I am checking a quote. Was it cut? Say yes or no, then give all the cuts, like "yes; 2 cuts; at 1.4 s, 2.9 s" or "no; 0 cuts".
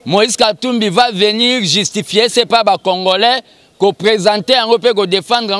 no; 0 cuts